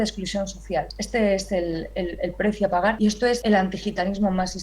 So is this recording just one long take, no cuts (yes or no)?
no